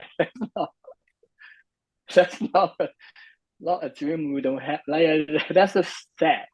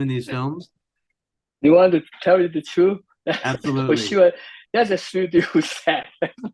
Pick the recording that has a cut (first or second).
second